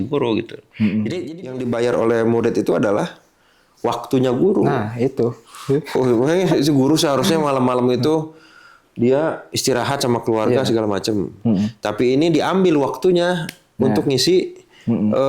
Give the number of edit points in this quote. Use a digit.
1